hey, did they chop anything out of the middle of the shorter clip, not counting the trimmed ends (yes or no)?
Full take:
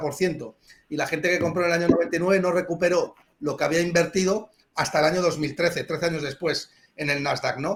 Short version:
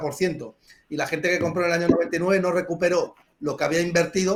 no